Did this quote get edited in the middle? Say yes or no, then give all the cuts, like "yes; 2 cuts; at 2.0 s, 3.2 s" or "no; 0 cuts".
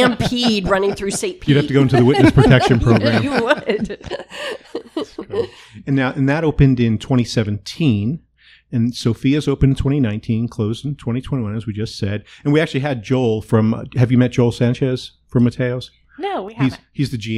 no; 0 cuts